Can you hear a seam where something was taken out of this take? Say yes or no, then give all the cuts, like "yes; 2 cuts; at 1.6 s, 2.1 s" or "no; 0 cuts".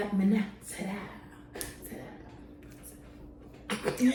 no; 0 cuts